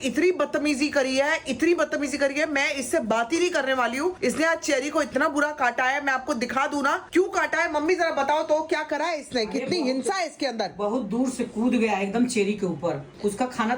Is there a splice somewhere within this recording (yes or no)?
no